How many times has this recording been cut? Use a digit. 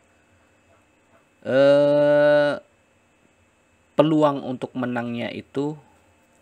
0